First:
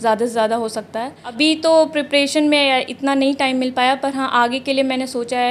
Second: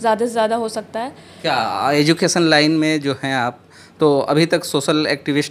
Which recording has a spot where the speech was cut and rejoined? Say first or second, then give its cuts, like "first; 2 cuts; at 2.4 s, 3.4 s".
first; 1 cut; at 1.4 s